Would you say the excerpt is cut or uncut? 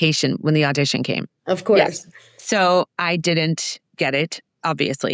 cut